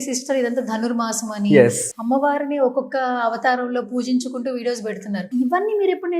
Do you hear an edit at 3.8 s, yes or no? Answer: no